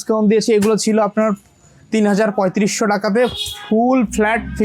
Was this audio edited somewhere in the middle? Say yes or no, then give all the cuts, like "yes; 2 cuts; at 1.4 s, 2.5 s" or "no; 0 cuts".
no; 0 cuts